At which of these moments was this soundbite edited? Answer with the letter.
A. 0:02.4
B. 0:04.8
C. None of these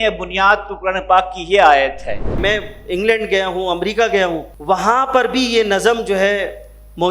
A